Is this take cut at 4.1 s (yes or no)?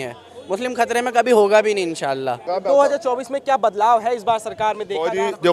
no